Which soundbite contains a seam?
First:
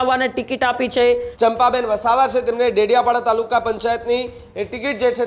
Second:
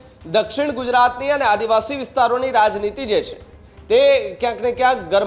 first; 1 cut; at 1.3 s

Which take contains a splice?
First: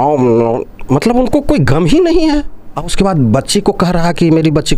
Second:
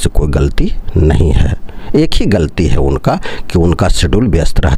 first; 1 cut; at 2.9 s

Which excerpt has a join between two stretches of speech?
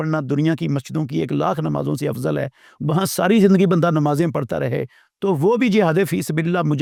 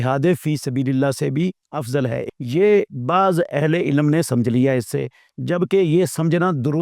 second; 1 cut; at 2.2 s

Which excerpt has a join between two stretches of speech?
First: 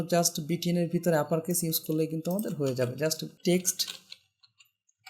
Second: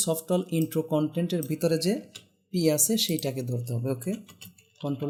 first; 1 cut; at 3.3 s

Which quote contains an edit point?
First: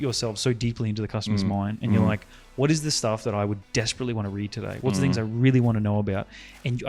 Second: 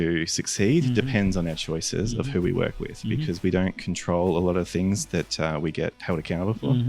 second; 1 cut; at 6.0 s

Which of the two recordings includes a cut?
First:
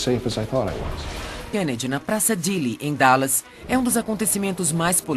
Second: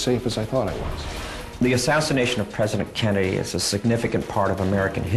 second; 1 cut; at 1.4 s

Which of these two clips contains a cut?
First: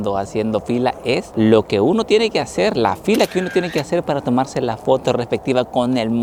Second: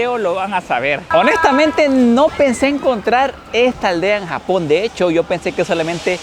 second; 1 cut; at 1.1 s

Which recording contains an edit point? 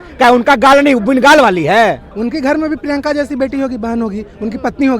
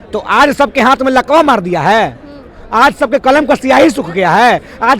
first; 1 cut; at 2.1 s

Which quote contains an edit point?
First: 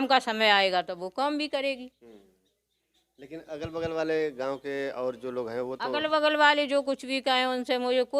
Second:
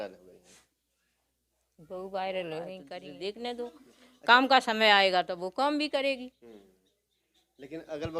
second; 1 cut; at 2.8 s

